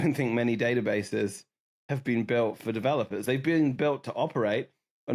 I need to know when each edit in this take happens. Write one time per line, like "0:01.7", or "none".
none